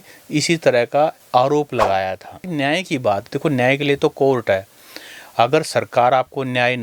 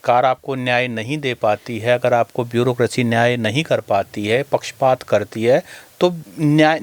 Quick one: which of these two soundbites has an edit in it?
first; 1 cut; at 2.4 s

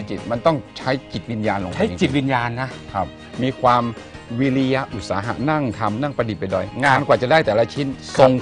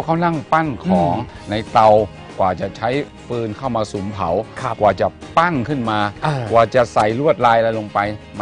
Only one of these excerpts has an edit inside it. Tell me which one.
second; 2 cuts; at 1.3 s, 3.2 s

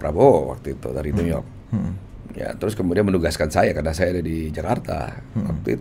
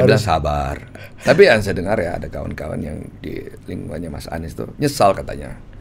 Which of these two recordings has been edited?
second; 1 cut; at 1.2 s

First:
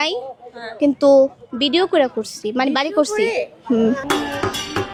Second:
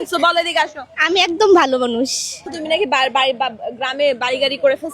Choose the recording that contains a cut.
second; 1 cut; at 2.5 s

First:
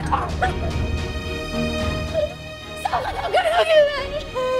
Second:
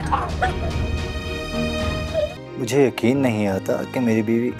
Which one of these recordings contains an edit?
second; 1 cut; at 2.4 s

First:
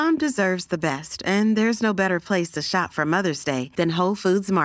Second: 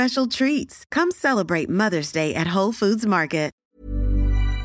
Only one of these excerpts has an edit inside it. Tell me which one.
second; 1 cut; at 3.6 s

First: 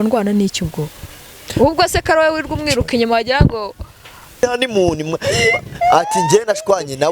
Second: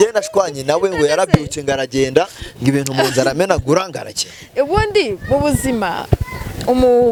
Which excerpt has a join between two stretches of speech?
first; 1 cut; at 4.4 s

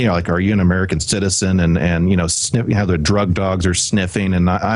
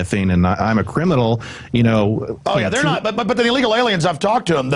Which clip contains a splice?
second; 1 cut; at 2.8 s

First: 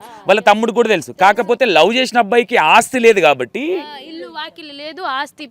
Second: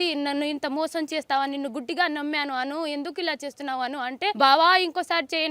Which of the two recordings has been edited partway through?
second; 1 cut; at 4.4 s

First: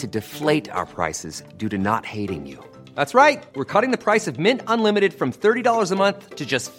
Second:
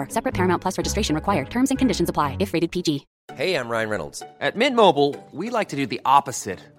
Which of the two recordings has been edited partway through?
second; 1 cut; at 3.1 s

